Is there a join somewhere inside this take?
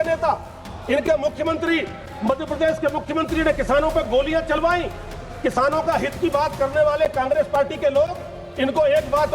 no; 0 cuts

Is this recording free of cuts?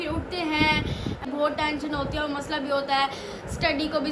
no; 1 cut; at 1.3 s

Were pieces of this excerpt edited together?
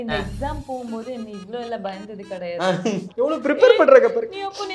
yes; 1 cut; at 3.1 s

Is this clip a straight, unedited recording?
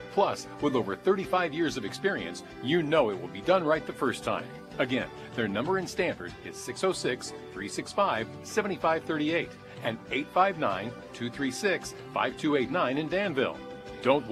yes; 0 cuts

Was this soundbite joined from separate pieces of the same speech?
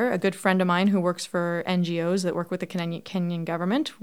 no; 0 cuts

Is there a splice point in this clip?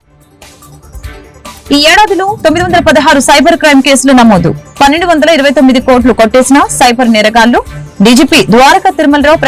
yes; 1 cut; at 1.5 s

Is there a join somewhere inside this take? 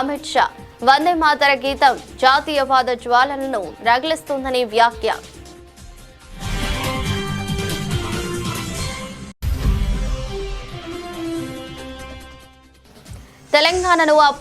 yes; 4 cuts; at 5.3 s, 9.4 s, 11.0 s, 13.4 s

